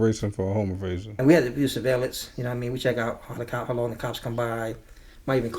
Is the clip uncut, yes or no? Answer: no